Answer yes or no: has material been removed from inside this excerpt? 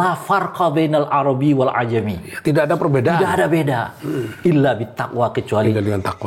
no